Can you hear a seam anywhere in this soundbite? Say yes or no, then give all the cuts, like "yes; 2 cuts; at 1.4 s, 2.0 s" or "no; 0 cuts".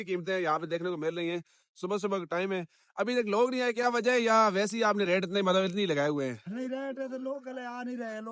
no; 0 cuts